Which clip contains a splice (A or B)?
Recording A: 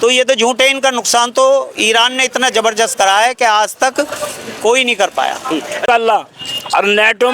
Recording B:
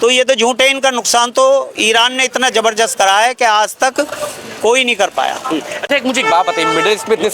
A